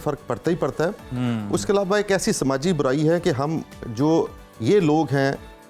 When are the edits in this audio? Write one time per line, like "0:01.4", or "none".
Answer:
none